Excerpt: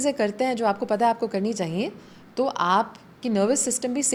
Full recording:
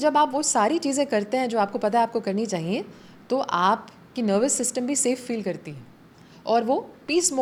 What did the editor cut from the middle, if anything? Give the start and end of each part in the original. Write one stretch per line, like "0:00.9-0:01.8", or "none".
none